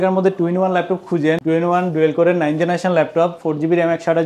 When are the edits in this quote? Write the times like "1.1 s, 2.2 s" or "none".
1.4 s